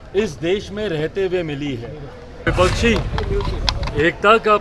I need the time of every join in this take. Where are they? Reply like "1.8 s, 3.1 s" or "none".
2.5 s